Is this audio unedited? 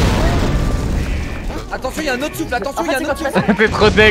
no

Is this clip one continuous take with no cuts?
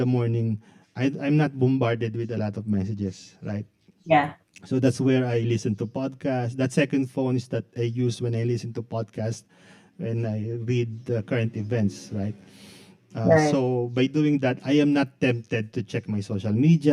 yes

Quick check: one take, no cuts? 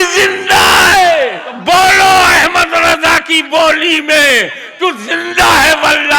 no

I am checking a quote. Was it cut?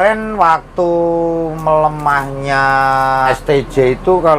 yes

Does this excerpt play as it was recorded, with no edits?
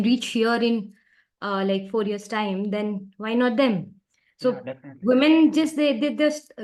yes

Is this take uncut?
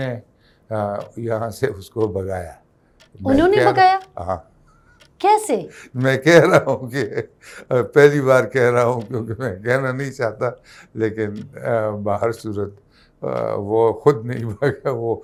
yes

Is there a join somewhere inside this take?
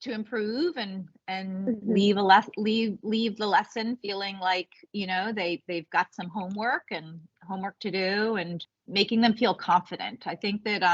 yes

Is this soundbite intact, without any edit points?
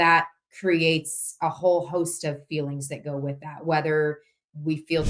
yes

